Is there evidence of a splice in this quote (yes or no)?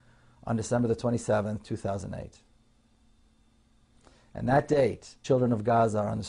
no